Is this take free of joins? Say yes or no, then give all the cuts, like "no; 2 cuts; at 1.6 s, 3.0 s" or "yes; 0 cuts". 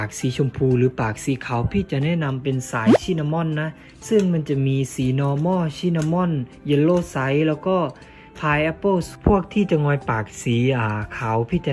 yes; 0 cuts